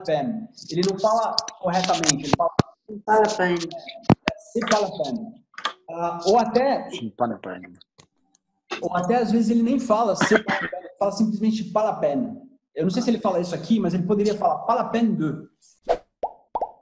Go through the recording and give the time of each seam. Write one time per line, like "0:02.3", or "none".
0:15.7